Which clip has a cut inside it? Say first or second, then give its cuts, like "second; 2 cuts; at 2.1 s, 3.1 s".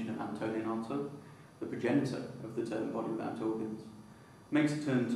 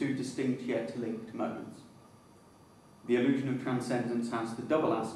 second; 1 cut; at 1.0 s